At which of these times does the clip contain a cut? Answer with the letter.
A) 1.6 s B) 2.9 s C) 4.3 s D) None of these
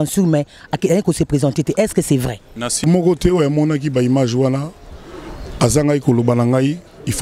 B